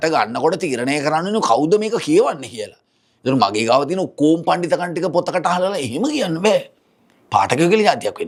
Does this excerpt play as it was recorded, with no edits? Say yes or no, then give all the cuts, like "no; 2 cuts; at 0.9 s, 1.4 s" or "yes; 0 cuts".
yes; 0 cuts